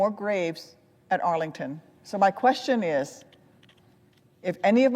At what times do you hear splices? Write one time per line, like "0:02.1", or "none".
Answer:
0:01.9